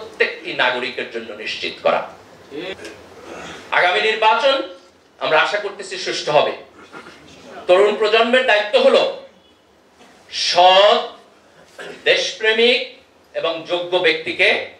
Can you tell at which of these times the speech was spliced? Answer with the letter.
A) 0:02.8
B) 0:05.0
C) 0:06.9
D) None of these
A